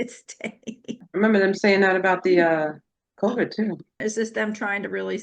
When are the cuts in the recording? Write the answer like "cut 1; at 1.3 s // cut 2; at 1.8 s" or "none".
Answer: cut 1; at 1.1 s // cut 2; at 4.0 s